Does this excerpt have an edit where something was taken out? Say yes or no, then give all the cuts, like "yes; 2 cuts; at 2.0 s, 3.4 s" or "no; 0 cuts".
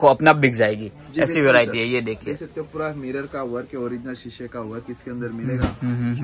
no; 0 cuts